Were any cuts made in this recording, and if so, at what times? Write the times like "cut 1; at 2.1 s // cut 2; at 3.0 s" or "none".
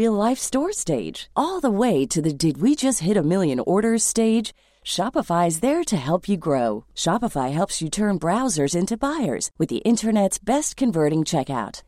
none